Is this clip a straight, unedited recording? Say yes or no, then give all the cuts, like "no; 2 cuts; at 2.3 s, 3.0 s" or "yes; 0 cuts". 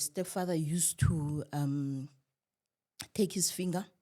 yes; 0 cuts